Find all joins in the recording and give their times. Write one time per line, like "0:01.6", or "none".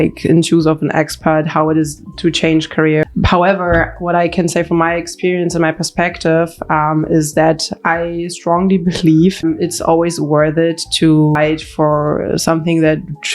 0:03.0
0:09.4
0:11.4